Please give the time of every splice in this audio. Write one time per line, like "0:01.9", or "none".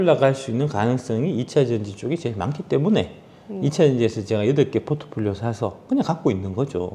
none